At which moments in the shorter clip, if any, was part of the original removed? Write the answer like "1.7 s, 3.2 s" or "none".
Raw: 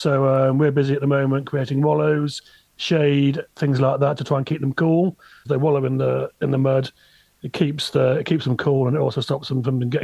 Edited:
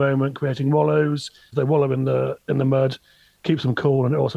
1.4 s, 3.4 s